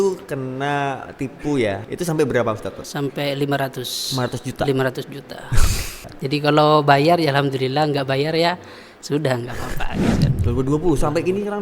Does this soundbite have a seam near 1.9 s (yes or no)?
yes